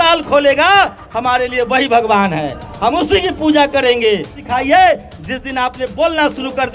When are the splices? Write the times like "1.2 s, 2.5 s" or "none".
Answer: 4.4 s